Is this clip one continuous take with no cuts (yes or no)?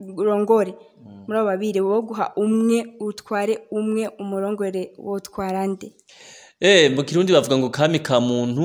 yes